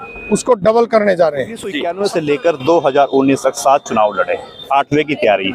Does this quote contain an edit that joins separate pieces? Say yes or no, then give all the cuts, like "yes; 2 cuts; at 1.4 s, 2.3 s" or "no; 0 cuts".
yes; 1 cut; at 1.8 s